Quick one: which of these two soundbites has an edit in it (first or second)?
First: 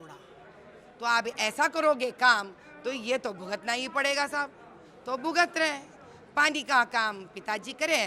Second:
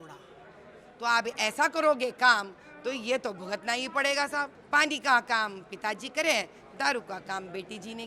second